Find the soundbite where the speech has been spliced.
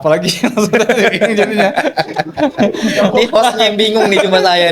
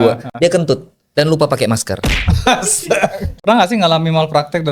second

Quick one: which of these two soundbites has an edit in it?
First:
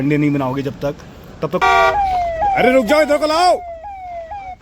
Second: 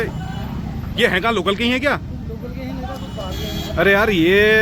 first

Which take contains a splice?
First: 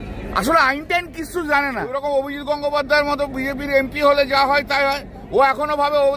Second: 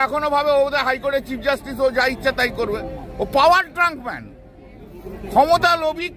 first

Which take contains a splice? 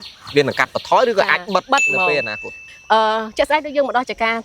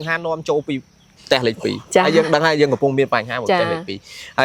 first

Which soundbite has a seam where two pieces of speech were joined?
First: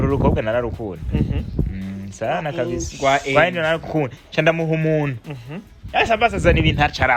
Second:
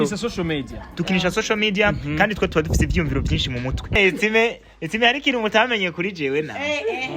second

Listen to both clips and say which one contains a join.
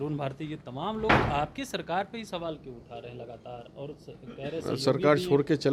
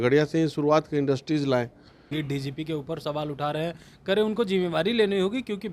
second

